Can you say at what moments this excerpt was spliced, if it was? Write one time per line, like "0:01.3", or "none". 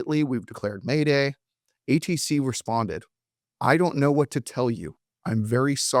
none